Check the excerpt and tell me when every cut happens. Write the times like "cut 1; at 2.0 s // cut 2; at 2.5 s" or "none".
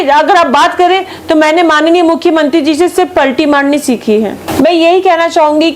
cut 1; at 4.4 s